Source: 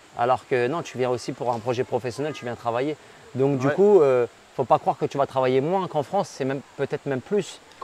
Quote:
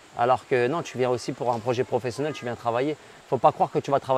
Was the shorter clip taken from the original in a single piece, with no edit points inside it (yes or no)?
no